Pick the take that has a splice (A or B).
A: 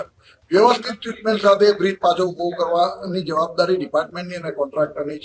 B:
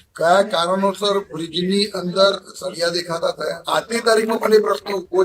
B